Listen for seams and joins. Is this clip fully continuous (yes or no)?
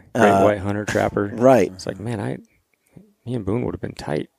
no